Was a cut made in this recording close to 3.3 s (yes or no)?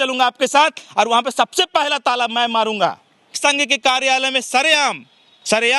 yes